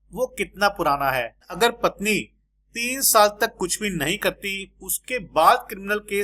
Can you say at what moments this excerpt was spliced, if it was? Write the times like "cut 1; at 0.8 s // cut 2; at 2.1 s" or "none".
cut 1; at 1.5 s